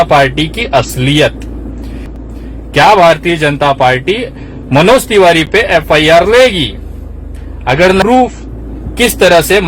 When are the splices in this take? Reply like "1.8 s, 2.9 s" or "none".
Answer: 2.0 s, 8.0 s